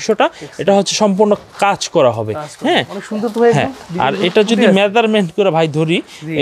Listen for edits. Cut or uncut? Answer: uncut